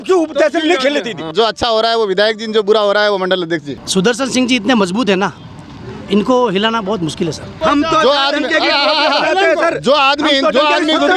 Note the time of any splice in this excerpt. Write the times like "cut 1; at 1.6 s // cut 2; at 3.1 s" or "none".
cut 1; at 1.3 s // cut 2; at 3.8 s // cut 3; at 7.5 s